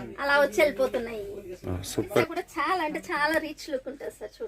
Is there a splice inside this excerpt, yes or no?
yes